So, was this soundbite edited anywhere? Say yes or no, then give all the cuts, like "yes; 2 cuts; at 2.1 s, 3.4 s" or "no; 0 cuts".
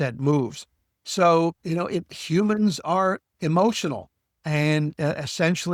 no; 0 cuts